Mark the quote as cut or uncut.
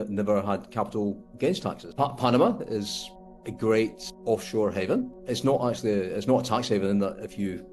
cut